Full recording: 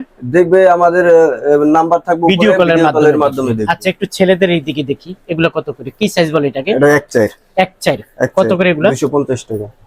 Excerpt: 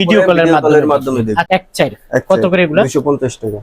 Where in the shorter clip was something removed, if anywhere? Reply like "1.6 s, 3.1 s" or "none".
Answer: 1.5 s